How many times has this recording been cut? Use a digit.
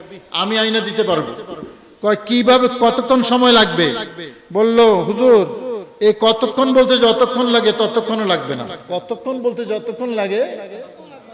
1